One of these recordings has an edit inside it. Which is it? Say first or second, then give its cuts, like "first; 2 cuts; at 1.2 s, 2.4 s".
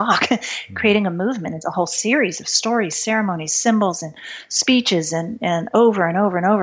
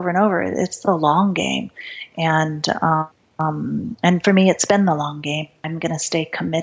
second; 2 cuts; at 3.2 s, 5.6 s